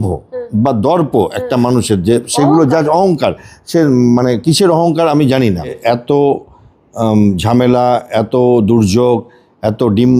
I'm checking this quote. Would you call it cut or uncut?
cut